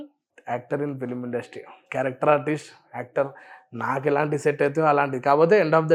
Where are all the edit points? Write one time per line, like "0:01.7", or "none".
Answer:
none